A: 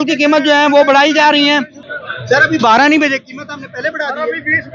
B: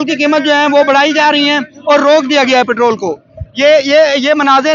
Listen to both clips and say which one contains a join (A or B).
A